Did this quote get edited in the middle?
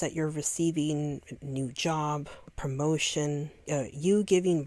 yes; 2 cuts; at 2.4 s, 3.5 s

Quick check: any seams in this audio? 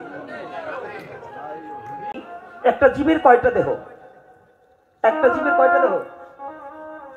yes; 1 cut; at 2.2 s

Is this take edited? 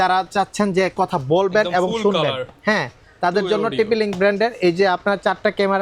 no; 0 cuts

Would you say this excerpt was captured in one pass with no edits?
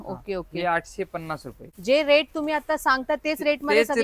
no; 1 cut; at 1.6 s

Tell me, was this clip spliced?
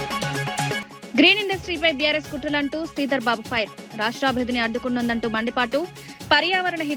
no; 0 cuts

